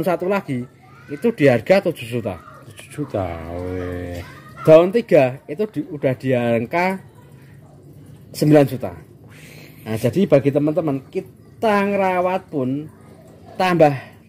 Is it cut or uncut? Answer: uncut